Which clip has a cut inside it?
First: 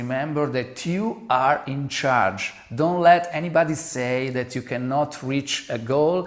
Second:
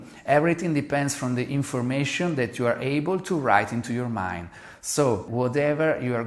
second; 1 cut; at 5.3 s

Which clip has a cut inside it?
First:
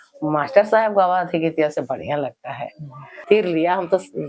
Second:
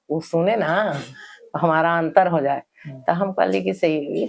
first; 1 cut; at 3.2 s

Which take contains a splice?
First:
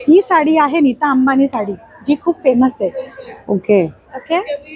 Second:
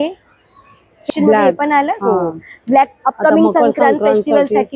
second; 1 cut; at 1.1 s

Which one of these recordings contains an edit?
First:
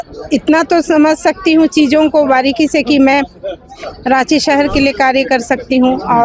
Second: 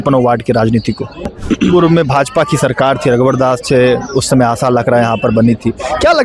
second; 1 cut; at 1.3 s

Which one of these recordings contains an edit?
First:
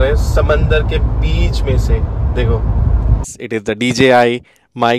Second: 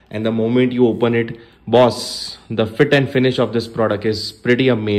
first; 1 cut; at 3.4 s

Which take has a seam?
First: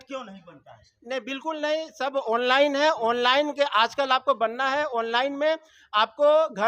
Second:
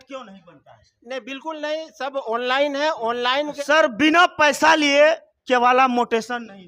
second; 1 cut; at 3.6 s

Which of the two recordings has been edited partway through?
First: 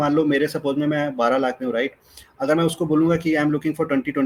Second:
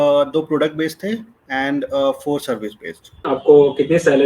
second; 1 cut; at 3.3 s

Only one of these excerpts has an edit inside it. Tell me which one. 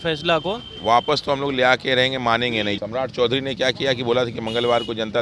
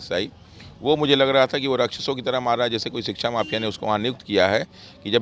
first; 1 cut; at 2.8 s

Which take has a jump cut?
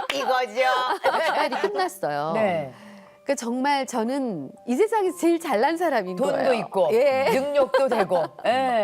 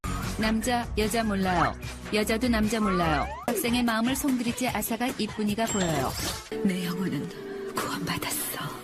first; 1 cut; at 1.5 s

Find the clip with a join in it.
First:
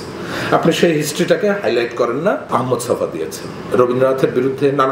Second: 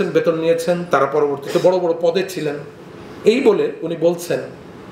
first; 2 cuts; at 2.4 s, 3.6 s

